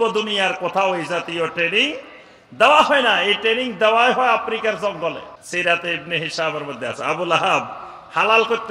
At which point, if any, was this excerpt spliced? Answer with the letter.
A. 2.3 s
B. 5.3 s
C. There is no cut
B